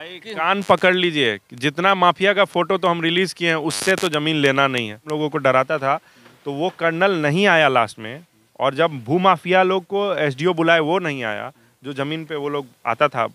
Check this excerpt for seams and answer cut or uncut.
cut